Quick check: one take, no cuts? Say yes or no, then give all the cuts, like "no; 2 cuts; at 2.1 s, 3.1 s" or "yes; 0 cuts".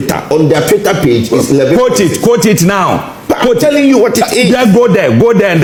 yes; 0 cuts